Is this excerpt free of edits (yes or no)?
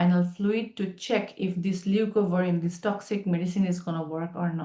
yes